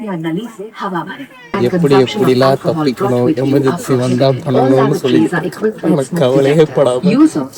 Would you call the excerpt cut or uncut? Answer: cut